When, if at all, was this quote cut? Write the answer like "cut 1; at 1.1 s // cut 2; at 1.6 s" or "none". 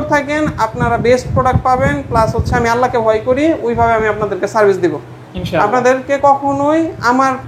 none

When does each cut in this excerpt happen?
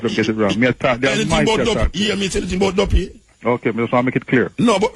none

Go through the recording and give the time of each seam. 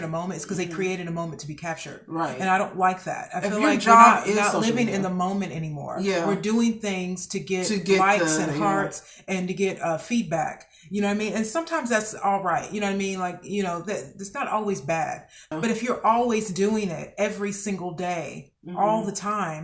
cut 1; at 15.5 s

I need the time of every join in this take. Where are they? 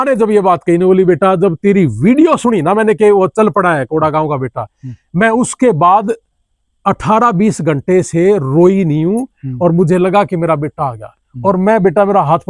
none

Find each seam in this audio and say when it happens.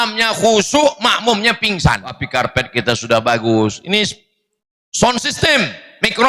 cut 1; at 2.2 s

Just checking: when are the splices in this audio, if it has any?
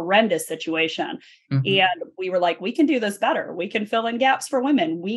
none

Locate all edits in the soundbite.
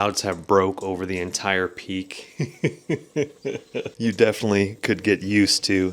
none

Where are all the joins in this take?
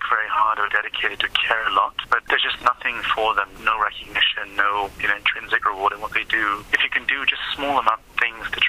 cut 1; at 2.2 s // cut 2; at 3.5 s // cut 3; at 5.0 s // cut 4; at 6.7 s

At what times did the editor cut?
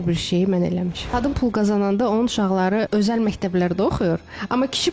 cut 1; at 1.1 s // cut 2; at 2.9 s

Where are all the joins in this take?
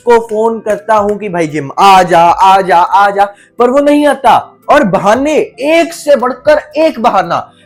none

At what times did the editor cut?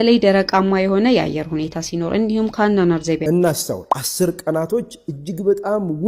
cut 1; at 3.2 s

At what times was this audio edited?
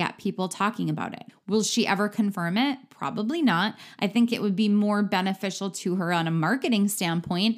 cut 1; at 1.2 s

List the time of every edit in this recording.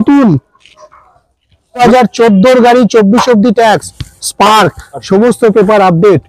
cut 1; at 1.8 s

